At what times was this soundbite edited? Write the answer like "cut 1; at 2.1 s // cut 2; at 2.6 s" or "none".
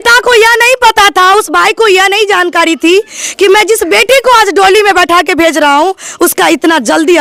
none